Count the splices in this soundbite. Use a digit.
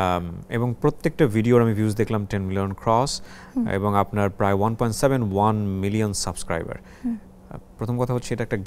0